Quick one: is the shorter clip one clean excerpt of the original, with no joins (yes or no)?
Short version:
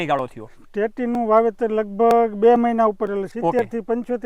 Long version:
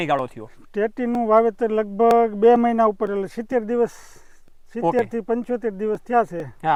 no